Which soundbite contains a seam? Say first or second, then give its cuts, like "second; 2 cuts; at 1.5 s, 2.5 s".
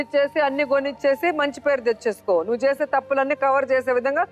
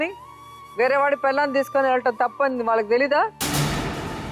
second; 1 cut; at 3.4 s